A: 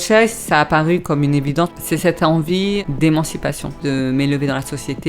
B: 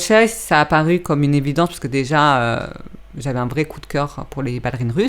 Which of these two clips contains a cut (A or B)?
A